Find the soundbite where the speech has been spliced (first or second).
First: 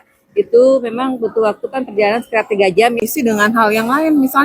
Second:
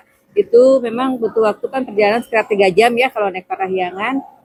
first